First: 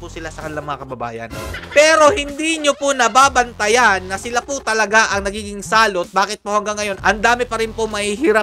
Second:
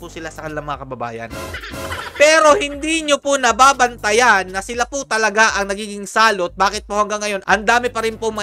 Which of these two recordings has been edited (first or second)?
first